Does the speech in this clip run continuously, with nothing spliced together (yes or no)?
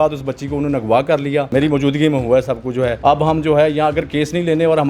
no